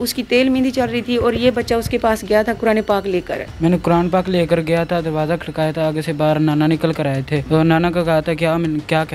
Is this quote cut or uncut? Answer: cut